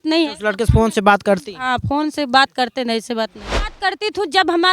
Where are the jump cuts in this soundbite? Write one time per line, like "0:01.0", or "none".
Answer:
0:03.8